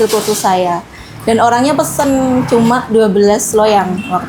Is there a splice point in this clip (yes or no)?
no